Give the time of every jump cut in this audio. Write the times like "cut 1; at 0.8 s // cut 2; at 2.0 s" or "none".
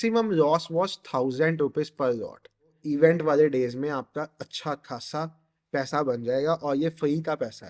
cut 1; at 2.8 s

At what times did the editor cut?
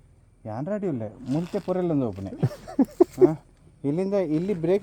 none

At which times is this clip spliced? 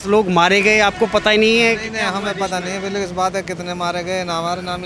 none

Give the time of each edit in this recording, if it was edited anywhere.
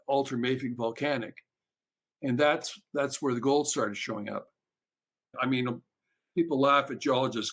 cut 1; at 5.3 s

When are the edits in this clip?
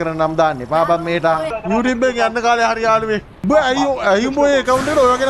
cut 1; at 1.5 s // cut 2; at 3.3 s

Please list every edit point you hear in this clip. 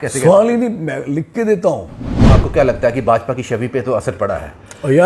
cut 1; at 2.2 s

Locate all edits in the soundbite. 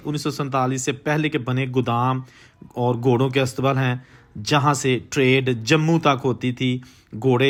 none

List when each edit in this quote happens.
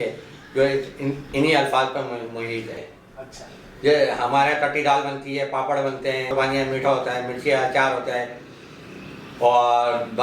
cut 1; at 2.9 s // cut 2; at 6.3 s

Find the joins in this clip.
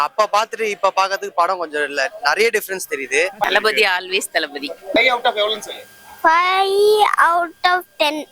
cut 1; at 3.4 s // cut 2; at 5.0 s

